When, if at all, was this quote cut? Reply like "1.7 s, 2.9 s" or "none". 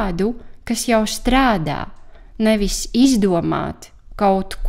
none